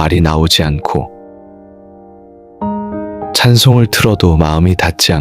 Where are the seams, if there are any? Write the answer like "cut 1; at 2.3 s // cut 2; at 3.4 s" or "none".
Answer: cut 1; at 1.5 s // cut 2; at 3.3 s